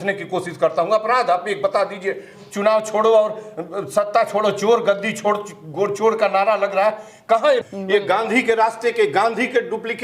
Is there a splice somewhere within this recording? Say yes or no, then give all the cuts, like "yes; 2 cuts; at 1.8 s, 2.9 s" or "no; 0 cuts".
yes; 2 cuts; at 2.3 s, 7.6 s